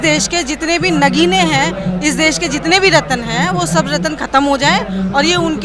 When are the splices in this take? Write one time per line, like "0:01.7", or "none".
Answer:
none